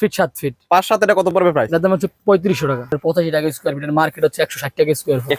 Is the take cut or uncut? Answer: cut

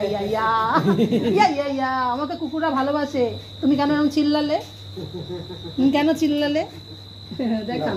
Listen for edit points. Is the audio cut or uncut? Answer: uncut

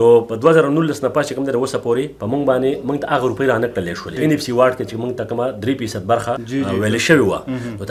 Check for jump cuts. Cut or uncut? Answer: uncut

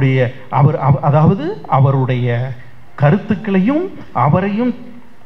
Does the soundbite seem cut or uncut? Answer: uncut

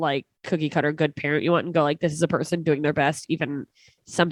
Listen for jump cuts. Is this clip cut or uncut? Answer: uncut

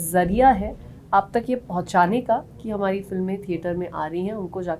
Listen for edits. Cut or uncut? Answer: uncut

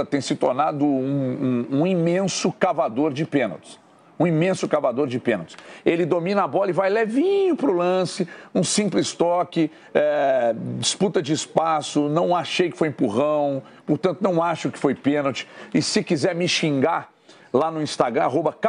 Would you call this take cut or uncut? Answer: uncut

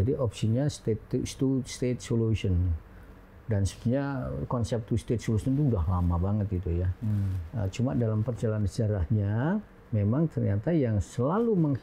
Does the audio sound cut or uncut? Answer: uncut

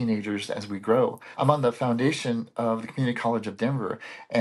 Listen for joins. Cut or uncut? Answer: cut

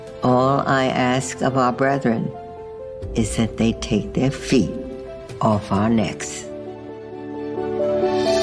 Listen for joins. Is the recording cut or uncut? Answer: cut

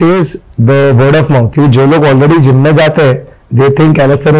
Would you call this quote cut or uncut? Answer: cut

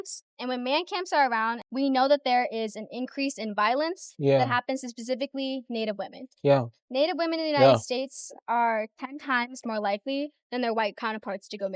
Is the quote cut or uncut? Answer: cut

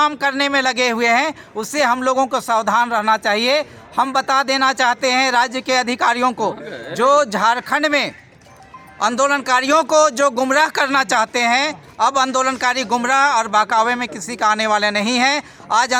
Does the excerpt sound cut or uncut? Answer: uncut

